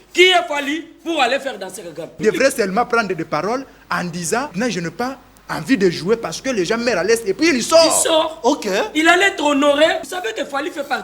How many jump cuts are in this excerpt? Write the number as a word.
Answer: three